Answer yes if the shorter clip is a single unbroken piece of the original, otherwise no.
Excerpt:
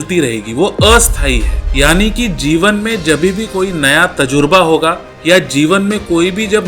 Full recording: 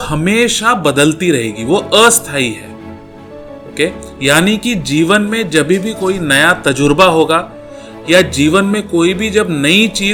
no